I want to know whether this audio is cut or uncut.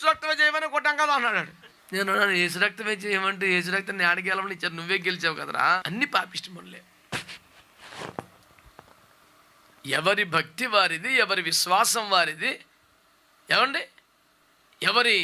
uncut